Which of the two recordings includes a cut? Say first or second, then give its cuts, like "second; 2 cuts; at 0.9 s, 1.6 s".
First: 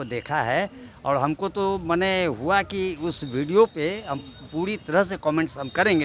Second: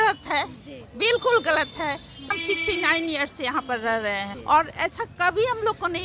second; 2 cuts; at 2.3 s, 4.3 s